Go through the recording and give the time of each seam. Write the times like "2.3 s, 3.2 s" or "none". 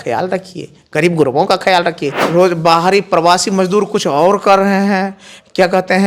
2.1 s

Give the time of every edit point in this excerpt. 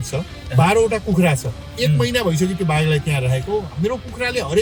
none

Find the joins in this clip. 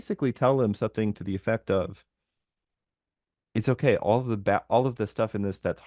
none

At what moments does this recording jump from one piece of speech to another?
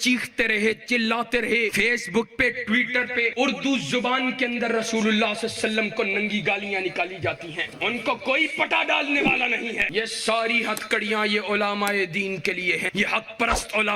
1.7 s, 3.3 s, 7.7 s, 9.8 s, 12.9 s

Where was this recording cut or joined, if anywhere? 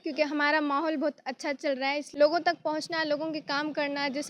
2.1 s

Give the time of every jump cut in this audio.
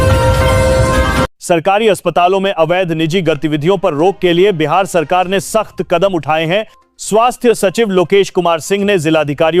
1.4 s

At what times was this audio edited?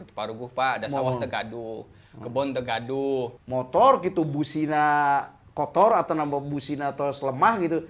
3.4 s

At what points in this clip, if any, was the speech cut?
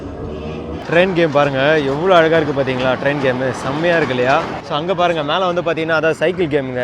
0.8 s, 4.6 s

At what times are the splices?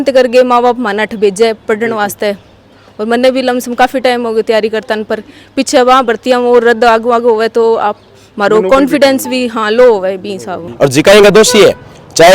10.7 s

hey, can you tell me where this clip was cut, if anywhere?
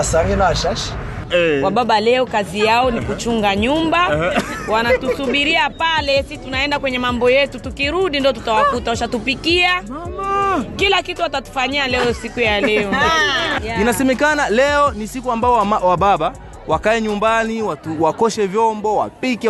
1.2 s, 13.6 s

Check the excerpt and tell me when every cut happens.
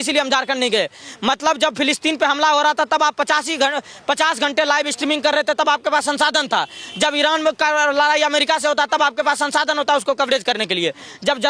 none

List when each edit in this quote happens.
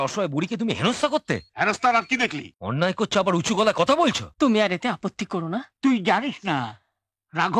1.5 s, 2.5 s, 4.2 s

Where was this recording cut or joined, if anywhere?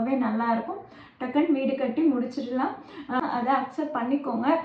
3.2 s

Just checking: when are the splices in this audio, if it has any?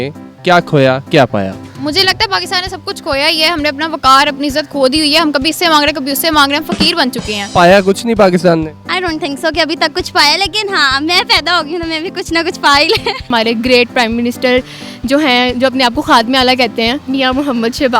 7.4 s, 13.3 s

